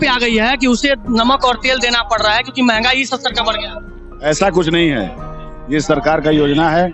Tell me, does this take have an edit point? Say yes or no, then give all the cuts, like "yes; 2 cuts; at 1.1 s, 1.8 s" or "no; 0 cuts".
no; 0 cuts